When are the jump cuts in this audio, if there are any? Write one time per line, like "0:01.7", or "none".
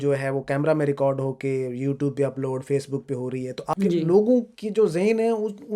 0:03.7